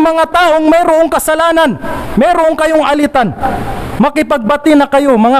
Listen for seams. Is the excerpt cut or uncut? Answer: uncut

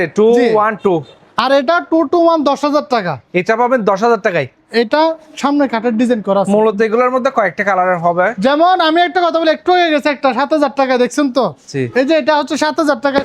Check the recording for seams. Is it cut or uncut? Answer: uncut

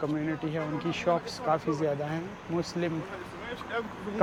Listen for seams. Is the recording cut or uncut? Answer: uncut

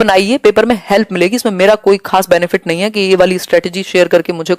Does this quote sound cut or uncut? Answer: uncut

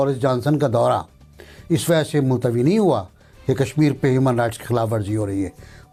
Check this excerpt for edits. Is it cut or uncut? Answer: uncut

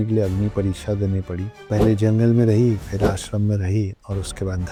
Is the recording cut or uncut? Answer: uncut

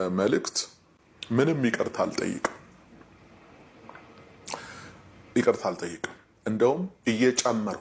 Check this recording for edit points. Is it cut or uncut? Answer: uncut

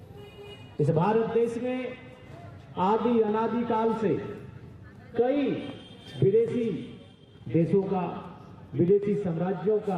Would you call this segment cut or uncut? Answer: uncut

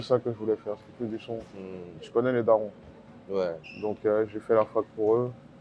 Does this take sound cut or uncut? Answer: uncut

